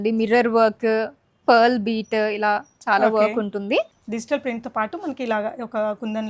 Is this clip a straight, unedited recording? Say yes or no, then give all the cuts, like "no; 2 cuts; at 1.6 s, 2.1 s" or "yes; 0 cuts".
no; 1 cut; at 3.9 s